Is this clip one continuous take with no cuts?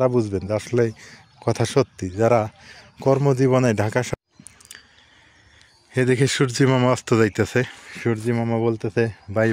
no; 1 cut; at 4.1 s

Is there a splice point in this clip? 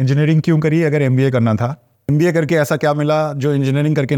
yes; 1 cut; at 1.9 s

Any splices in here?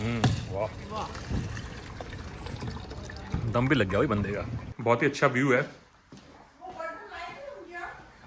yes; 1 cut; at 4.7 s

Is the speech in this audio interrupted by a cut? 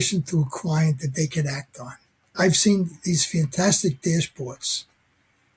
yes; 1 cut; at 2.3 s

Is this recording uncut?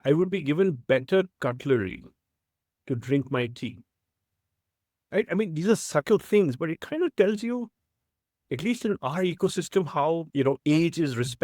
no; 1 cut; at 10.3 s

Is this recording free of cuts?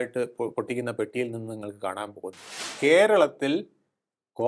no; 1 cut; at 2.6 s

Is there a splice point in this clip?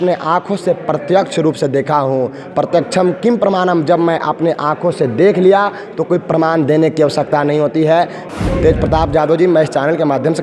yes; 1 cut; at 8.3 s

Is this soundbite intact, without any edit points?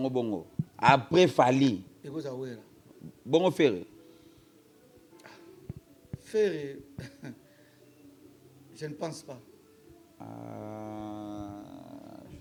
yes; 0 cuts

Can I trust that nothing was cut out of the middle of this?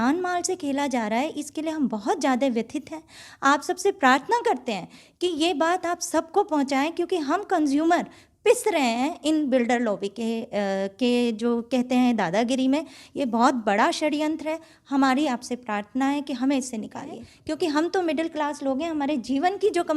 yes; 0 cuts

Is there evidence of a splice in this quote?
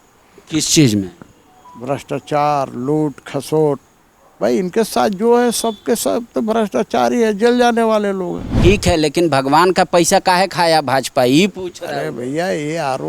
yes; 1 cut; at 8.4 s

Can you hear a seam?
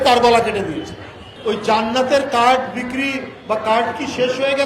yes; 1 cut; at 1.3 s

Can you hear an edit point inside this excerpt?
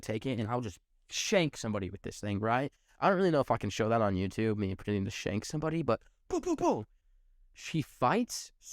yes; 1 cut; at 7.0 s

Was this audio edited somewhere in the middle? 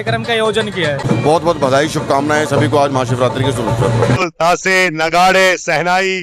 yes; 2 cuts; at 1.0 s, 4.3 s

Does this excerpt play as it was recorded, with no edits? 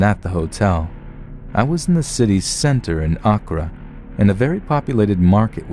yes; 0 cuts

